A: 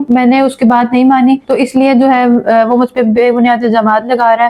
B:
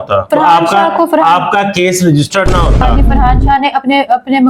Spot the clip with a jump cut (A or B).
B